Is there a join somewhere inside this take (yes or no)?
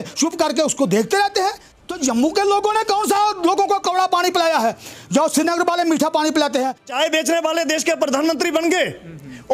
yes